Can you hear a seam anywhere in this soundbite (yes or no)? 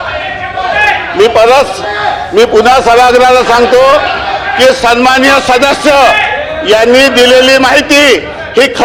no